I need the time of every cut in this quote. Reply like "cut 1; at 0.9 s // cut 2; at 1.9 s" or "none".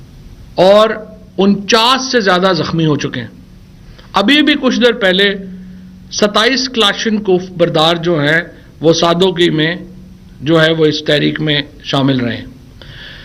none